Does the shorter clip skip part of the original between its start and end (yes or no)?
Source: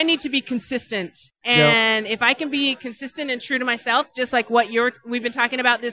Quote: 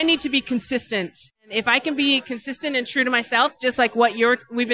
yes